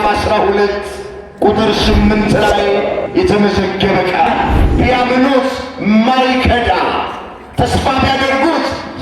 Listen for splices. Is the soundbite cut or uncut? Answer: cut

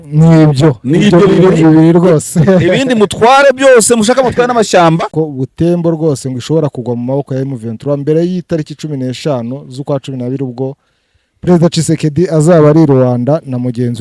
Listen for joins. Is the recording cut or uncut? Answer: cut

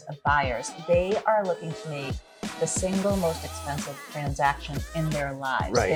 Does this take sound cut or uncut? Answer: uncut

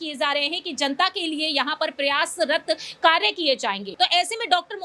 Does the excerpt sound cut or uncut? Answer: cut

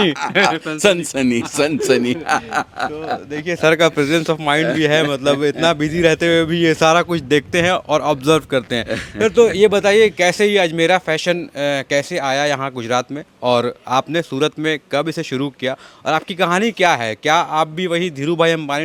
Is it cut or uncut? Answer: uncut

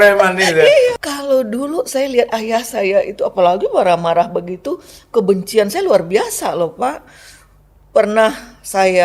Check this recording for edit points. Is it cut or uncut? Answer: cut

